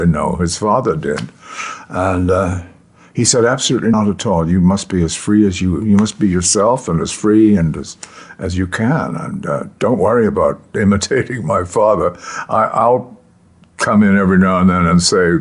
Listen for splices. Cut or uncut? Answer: cut